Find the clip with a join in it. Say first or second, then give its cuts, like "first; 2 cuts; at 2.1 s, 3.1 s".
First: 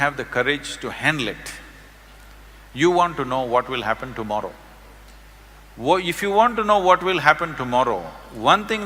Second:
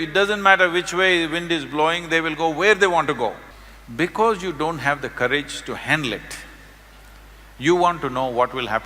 second; 1 cut; at 3.5 s